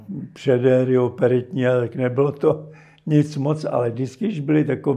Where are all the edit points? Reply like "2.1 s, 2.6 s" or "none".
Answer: none